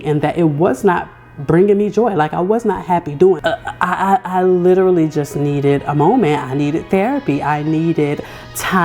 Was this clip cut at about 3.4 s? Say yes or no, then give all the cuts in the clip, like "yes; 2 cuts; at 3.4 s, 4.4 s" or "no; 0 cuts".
yes; 1 cut; at 3.4 s